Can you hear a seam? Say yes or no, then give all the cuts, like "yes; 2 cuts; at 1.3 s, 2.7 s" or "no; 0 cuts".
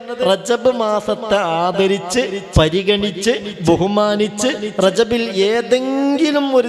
no; 0 cuts